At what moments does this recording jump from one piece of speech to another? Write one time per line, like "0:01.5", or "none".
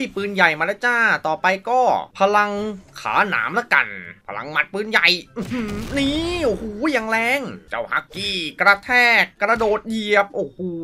0:04.2
0:07.6